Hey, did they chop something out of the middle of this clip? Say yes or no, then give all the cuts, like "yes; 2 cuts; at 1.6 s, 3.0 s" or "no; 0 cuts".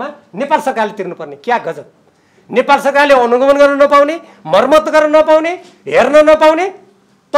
no; 0 cuts